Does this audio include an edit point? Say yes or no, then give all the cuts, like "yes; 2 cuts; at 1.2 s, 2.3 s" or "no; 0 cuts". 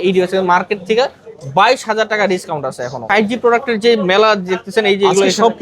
yes; 1 cut; at 3.1 s